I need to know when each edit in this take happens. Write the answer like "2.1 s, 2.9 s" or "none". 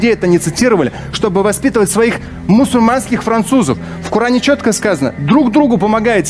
none